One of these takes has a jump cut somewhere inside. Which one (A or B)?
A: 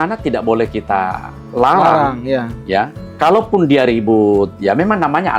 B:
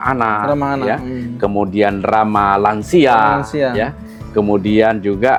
A